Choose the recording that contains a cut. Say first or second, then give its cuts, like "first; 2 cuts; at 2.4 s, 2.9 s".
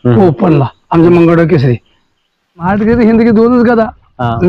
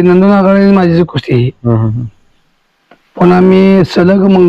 first; 1 cut; at 2.6 s